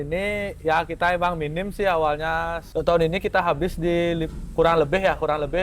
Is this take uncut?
no; 1 cut; at 2.6 s

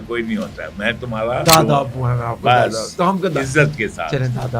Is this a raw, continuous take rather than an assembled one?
no; 1 cut; at 1.4 s

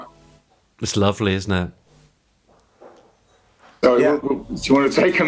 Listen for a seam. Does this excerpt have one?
yes; 1 cut; at 1.9 s

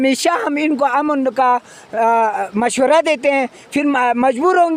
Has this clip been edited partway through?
no; 0 cuts

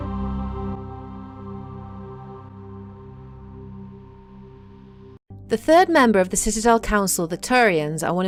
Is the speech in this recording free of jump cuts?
yes; 0 cuts

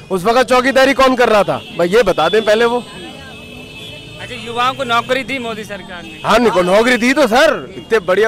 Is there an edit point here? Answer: no; 0 cuts

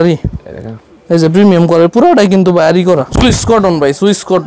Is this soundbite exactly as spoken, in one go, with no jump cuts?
no; 1 cut; at 3.1 s

